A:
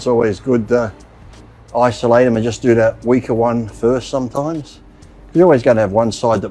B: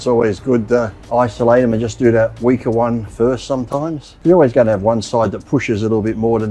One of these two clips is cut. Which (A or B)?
B